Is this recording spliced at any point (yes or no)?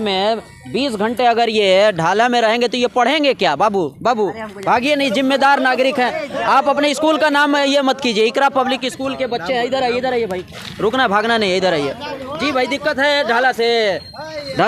no